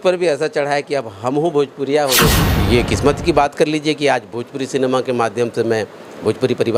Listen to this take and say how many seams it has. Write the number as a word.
one